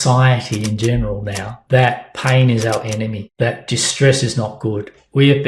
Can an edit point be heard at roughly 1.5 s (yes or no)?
yes